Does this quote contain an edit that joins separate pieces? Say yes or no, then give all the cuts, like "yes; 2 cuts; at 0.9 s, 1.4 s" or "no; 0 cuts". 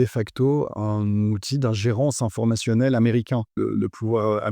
yes; 1 cut; at 3.6 s